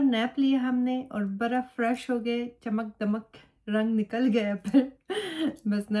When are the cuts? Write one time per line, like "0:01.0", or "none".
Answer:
none